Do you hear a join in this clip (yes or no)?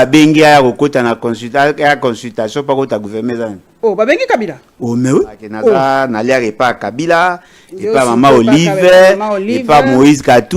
yes